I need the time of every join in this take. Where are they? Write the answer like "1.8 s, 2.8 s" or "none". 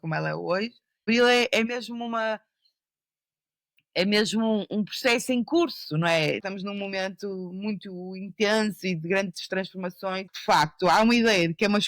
1.1 s, 6.4 s, 10.3 s